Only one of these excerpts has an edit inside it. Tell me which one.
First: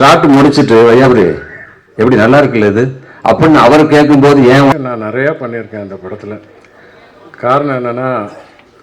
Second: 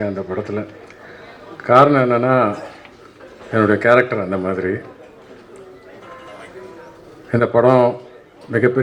first; 1 cut; at 4.7 s

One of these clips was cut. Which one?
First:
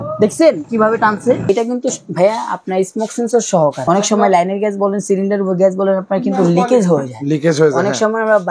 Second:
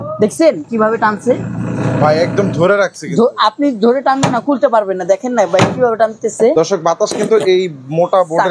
first; 2 cuts; at 1.4 s, 3.8 s

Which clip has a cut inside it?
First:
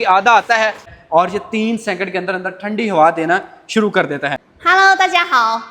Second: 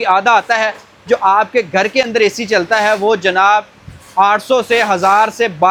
first; 2 cuts; at 0.9 s, 4.5 s

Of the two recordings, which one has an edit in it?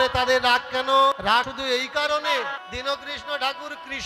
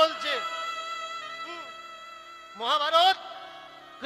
first; 2 cuts; at 1.4 s, 2.6 s

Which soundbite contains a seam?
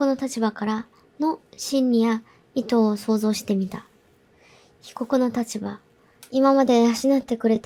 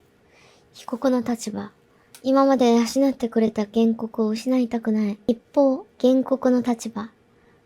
second; 1 cut; at 5.3 s

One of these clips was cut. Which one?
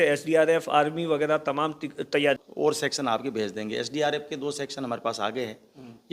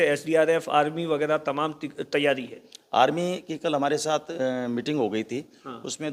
first; 1 cut; at 2.5 s

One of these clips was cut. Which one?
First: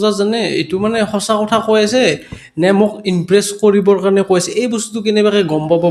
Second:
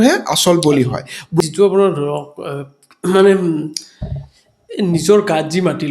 second; 1 cut; at 1.4 s

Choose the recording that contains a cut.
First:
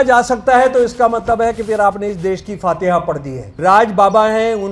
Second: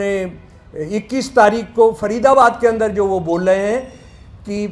first; 1 cut; at 3.5 s

